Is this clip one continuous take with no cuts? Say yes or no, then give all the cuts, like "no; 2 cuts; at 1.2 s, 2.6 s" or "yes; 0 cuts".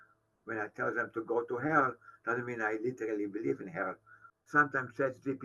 no; 1 cut; at 4.3 s